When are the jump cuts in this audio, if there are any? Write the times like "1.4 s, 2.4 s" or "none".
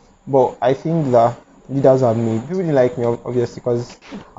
2.5 s

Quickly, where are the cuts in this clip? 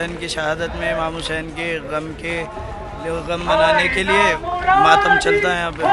none

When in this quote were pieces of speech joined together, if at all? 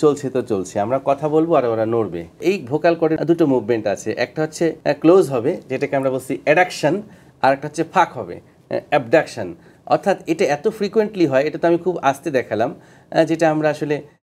none

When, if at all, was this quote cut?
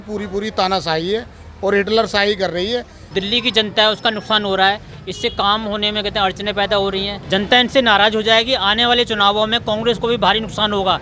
3.0 s, 7.2 s

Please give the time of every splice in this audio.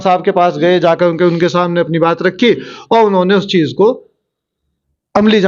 none

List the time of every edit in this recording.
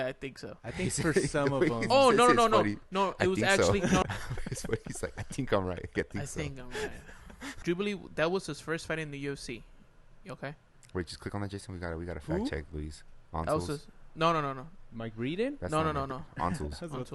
4.0 s, 7.5 s

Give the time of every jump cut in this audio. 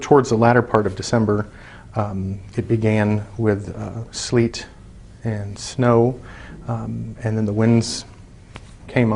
3.6 s

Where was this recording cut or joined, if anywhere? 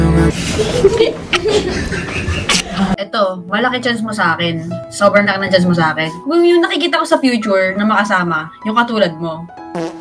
3.0 s

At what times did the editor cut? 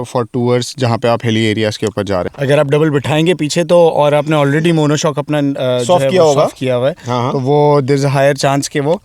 2.3 s

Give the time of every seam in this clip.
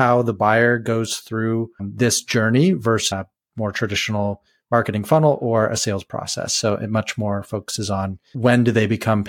1.9 s, 3.1 s, 8.3 s

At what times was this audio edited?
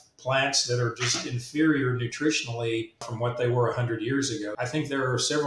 3.0 s, 4.6 s

